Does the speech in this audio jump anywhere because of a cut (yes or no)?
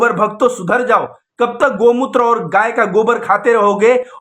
no